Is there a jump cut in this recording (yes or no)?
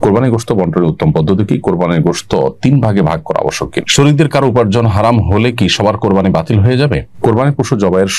yes